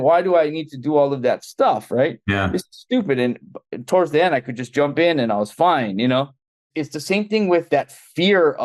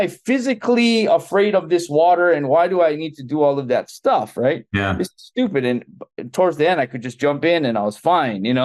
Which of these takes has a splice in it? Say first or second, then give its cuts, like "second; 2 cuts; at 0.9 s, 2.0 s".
first; 1 cut; at 7.7 s